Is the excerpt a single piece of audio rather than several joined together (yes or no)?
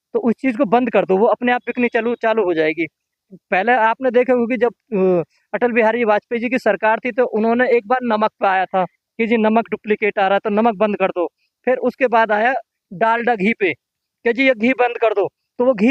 yes